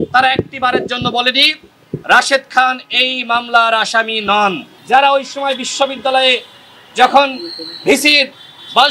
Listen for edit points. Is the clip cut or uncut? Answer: cut